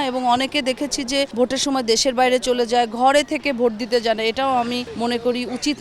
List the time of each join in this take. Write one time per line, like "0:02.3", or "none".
0:01.3
0:04.9